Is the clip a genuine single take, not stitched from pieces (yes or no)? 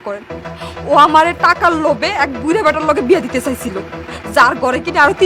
yes